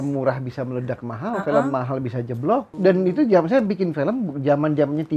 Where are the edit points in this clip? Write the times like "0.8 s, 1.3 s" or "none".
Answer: 2.7 s